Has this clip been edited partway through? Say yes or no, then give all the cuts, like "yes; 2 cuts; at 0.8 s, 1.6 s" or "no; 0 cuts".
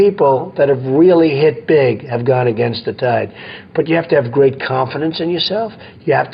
no; 0 cuts